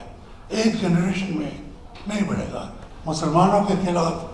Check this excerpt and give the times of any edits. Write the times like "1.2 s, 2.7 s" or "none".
2.8 s